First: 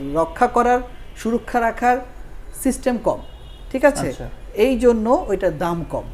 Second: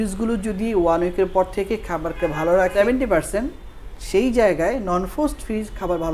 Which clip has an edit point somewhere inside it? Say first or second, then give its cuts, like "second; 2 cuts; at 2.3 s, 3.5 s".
second; 1 cut; at 2.7 s